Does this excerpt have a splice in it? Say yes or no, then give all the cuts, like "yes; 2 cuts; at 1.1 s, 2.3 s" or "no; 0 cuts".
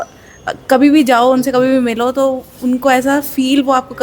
no; 0 cuts